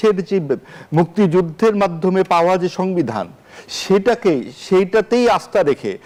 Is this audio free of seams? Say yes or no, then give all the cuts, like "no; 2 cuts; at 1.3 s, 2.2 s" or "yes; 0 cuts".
yes; 0 cuts